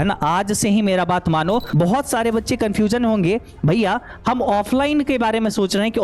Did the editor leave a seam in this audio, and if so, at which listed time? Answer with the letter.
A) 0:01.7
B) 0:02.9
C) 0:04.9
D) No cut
A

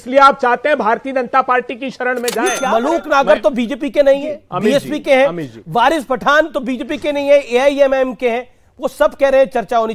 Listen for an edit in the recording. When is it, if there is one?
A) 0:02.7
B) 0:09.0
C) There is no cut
A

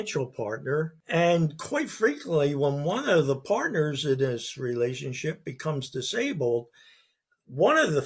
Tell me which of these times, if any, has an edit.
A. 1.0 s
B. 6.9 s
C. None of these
A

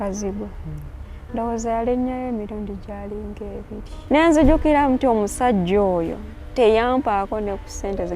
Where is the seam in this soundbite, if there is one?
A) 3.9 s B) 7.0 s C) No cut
A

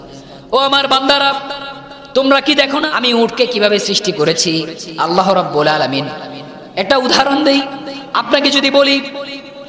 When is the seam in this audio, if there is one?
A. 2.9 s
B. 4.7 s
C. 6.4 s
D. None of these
A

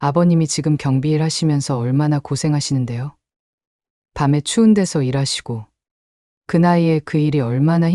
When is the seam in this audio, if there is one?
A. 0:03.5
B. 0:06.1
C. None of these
C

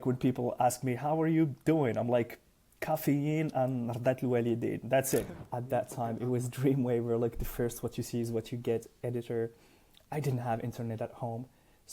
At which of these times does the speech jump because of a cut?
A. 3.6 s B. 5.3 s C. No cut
B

